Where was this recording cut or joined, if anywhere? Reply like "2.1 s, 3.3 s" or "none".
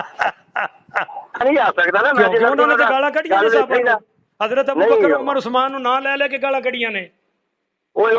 1.4 s